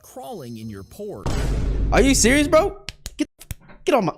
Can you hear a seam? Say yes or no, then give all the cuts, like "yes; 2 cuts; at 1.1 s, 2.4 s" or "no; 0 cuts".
yes; 1 cut; at 1.3 s